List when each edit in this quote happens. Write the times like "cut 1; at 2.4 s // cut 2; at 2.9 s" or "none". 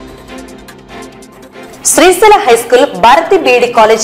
cut 1; at 1.1 s